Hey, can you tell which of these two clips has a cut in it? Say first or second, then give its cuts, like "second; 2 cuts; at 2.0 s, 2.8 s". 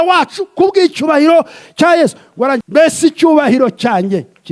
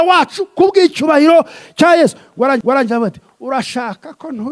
first; 1 cut; at 2.6 s